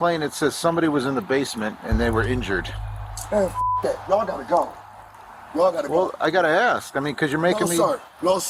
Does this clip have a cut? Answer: no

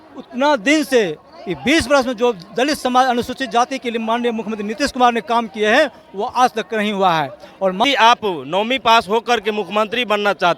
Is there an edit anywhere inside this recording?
yes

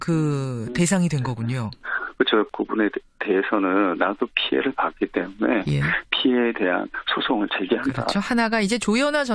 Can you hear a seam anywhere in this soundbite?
yes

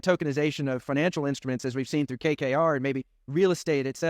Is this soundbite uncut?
yes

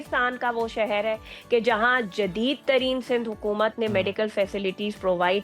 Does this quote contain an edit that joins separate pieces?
no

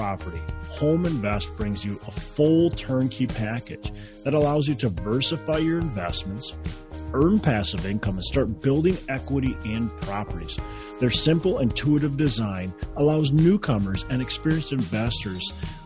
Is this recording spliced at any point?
no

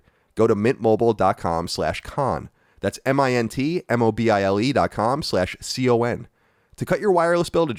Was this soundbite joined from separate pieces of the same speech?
no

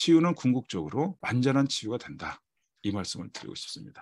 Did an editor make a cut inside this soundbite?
yes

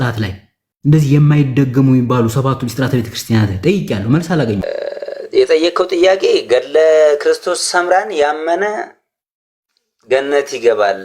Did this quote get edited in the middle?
yes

